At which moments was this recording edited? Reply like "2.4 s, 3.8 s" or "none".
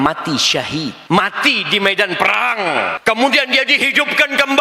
1.0 s, 3.0 s